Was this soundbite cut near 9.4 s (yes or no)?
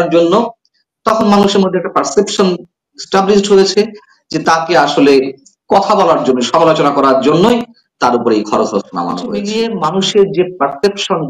yes